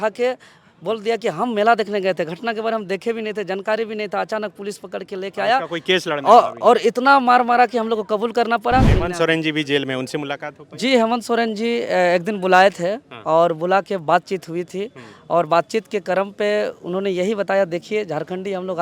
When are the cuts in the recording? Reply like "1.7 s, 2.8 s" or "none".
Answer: 8.9 s